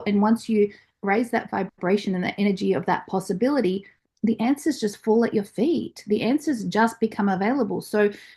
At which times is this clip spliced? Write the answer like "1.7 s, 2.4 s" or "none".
none